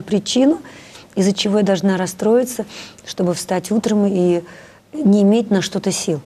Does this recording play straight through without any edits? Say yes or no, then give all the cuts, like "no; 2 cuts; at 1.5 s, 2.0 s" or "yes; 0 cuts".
yes; 0 cuts